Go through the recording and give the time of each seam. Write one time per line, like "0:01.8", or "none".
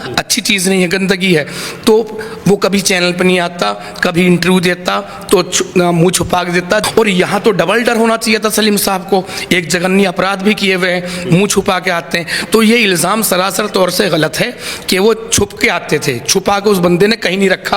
0:06.9